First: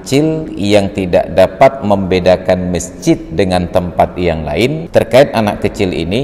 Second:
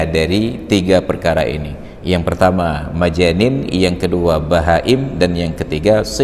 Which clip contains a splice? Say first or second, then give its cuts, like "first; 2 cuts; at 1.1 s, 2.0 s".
first; 1 cut; at 4.8 s